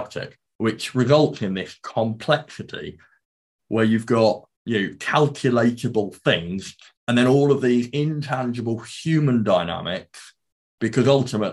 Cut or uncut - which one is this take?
cut